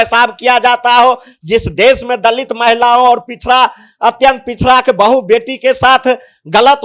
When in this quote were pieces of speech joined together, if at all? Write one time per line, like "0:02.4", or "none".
none